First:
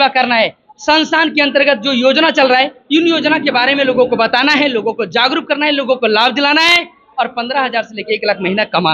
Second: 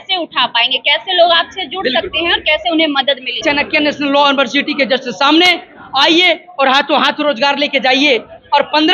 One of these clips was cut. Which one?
second; 1 cut; at 3.4 s

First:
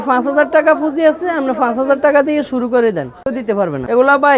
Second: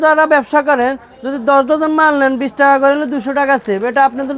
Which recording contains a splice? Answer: first; 1 cut; at 3.5 s

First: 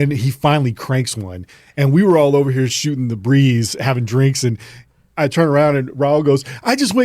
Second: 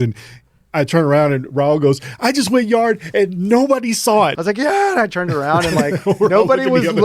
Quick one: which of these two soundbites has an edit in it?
second; 1 cut; at 4.3 s

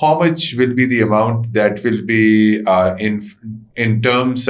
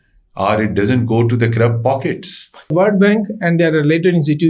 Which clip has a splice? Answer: second; 1 cut; at 2.7 s

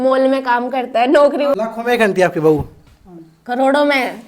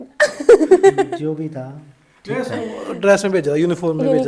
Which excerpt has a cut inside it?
first; 1 cut; at 1.5 s

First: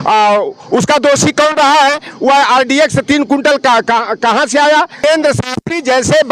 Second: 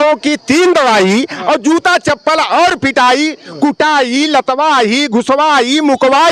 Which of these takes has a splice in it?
first; 1 cut; at 5.0 s

